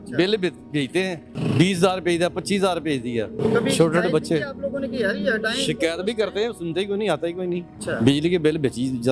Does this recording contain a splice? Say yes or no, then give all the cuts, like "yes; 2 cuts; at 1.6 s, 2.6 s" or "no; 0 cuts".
no; 0 cuts